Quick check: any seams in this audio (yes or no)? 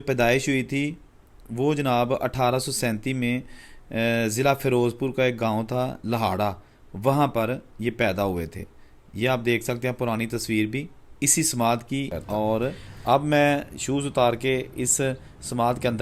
yes